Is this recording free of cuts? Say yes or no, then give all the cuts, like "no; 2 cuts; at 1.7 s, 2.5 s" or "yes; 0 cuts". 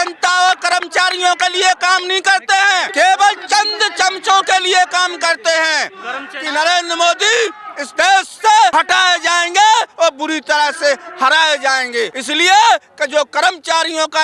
no; 4 cuts; at 2.9 s, 6.3 s, 8.7 s, 12.2 s